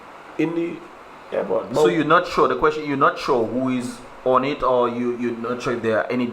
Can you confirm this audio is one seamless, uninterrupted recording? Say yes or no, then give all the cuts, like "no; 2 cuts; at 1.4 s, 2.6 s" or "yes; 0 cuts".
yes; 0 cuts